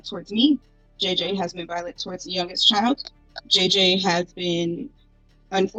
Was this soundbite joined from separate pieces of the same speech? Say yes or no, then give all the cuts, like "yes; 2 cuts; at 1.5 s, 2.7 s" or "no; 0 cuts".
no; 0 cuts